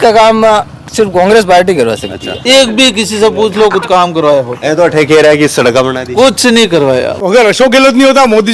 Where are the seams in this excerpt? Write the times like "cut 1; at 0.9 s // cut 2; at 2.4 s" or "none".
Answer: cut 1; at 2.4 s // cut 2; at 7.2 s